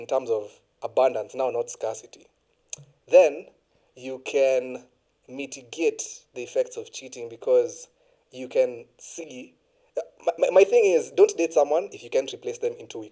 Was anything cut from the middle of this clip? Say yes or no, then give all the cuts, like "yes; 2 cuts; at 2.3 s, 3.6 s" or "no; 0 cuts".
no; 0 cuts